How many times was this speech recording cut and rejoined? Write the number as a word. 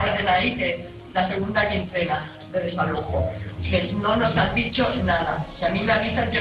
one